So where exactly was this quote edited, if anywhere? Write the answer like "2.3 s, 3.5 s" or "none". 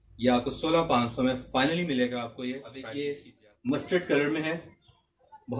2.7 s